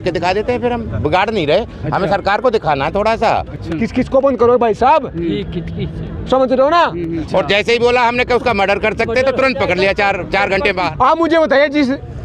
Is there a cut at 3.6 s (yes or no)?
yes